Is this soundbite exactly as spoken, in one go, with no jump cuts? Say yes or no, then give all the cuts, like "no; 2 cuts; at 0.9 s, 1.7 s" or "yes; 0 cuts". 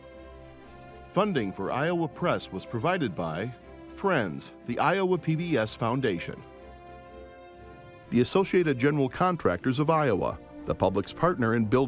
no; 1 cut; at 1.1 s